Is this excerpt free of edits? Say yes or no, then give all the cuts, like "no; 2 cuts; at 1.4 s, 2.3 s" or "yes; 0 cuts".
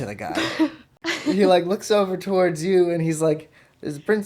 no; 1 cut; at 1.3 s